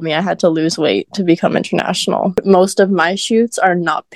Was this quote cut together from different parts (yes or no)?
yes